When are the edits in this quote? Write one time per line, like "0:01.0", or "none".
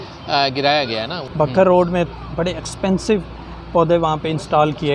0:01.2